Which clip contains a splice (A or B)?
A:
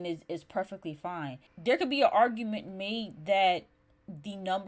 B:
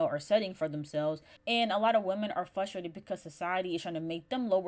A